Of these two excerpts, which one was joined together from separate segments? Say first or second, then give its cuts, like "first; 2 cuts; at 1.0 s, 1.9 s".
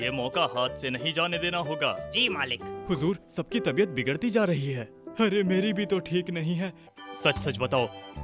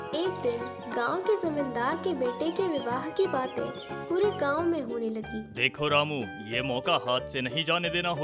first; 2 cuts; at 2.7 s, 6.8 s